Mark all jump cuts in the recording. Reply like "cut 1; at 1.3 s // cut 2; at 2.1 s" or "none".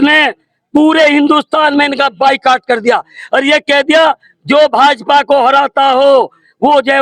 none